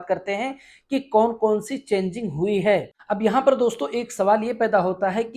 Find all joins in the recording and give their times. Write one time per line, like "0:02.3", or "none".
0:02.9